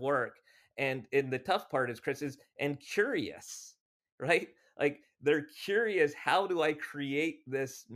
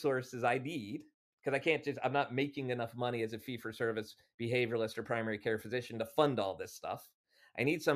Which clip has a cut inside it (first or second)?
second